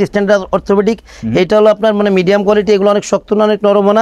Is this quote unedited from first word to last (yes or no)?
yes